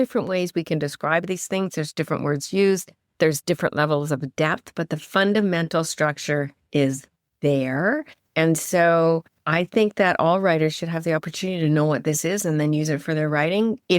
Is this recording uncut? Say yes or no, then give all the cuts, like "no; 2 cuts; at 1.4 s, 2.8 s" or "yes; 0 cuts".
no; 1 cut; at 9.4 s